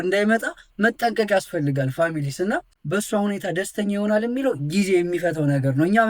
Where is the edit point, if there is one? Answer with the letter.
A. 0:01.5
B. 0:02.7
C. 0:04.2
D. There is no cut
B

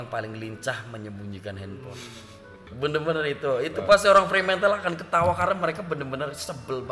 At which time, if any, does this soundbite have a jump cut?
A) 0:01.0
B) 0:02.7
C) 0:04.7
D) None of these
B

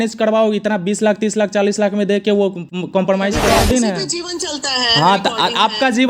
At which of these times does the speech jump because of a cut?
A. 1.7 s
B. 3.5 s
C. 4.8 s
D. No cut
B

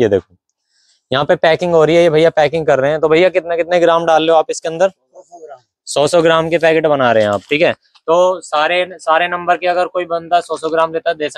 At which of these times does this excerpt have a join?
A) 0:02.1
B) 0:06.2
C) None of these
C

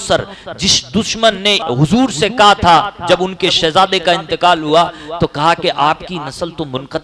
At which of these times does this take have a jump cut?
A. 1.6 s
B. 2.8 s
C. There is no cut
A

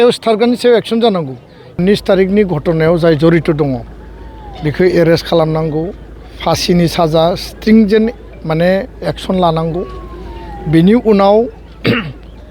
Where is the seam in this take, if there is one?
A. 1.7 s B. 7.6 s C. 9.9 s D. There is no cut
A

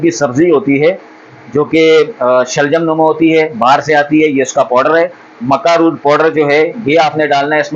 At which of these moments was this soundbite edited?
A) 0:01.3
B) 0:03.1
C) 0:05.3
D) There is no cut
D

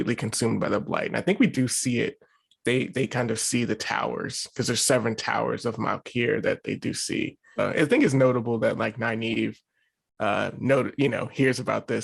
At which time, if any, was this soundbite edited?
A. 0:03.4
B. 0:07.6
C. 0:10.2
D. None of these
B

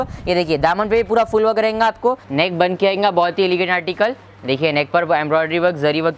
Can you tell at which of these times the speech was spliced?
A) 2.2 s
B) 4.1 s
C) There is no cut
A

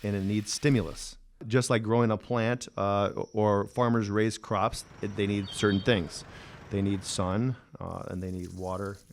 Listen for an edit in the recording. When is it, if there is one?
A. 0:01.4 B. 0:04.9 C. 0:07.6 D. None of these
A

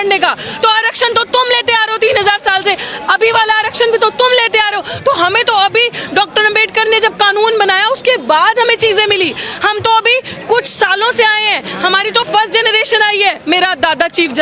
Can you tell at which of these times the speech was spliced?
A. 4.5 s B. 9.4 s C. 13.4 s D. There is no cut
C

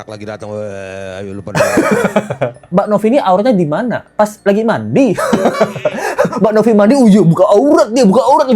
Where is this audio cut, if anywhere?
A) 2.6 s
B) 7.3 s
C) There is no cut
A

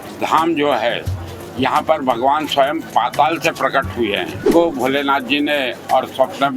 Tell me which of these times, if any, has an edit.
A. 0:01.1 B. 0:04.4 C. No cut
B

